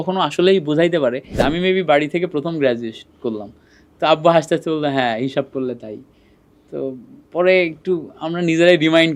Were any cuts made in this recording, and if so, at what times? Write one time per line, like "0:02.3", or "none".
0:01.4